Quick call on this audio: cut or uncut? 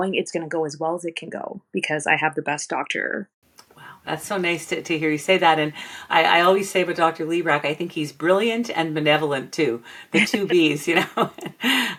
uncut